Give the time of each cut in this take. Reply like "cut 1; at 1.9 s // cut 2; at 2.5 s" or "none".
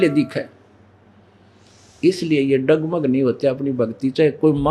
none